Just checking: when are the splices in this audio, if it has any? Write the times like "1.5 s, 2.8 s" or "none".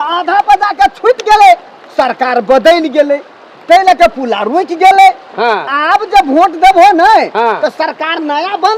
none